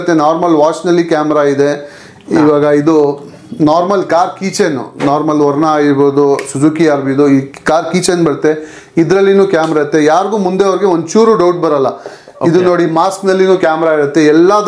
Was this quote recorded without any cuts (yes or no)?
yes